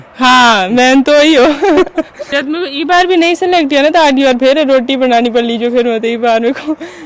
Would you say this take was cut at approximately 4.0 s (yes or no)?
no